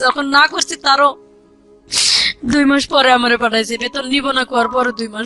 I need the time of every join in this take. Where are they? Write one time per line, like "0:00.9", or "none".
none